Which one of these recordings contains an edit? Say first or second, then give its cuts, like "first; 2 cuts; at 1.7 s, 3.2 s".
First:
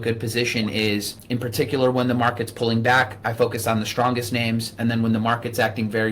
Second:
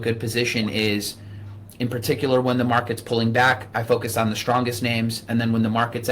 first; 1 cut; at 1.1 s